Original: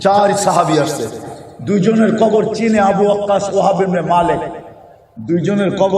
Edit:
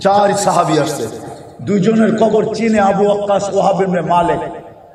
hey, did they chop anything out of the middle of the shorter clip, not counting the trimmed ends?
no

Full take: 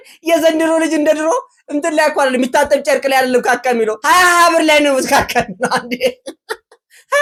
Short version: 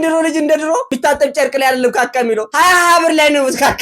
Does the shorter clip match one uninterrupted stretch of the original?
no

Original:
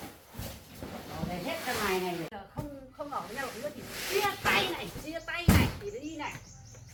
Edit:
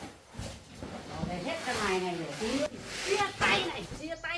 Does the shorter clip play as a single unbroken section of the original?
no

